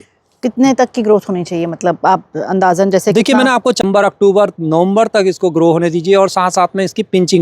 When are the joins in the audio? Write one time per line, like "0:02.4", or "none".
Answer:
0:03.8